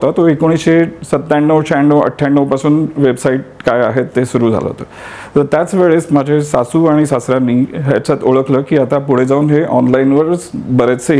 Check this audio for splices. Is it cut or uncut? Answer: uncut